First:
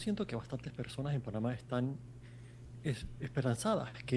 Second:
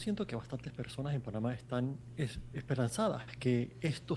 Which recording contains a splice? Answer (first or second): second